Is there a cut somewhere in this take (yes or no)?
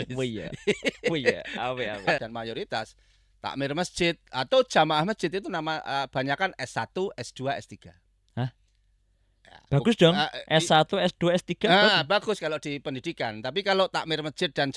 yes